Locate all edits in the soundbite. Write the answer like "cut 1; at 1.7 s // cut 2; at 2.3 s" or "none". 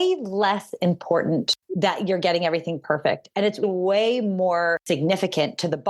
cut 1; at 1.6 s // cut 2; at 4.8 s